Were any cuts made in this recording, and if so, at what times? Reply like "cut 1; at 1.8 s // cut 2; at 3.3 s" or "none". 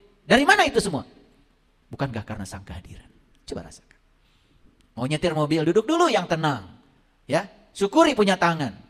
none